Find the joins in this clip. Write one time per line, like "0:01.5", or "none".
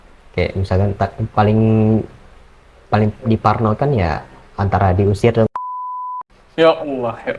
none